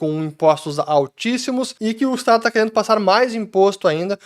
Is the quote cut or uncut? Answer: cut